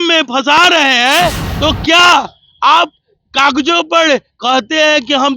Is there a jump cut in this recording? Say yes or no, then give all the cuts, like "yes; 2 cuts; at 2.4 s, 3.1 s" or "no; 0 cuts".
yes; 1 cut; at 1.5 s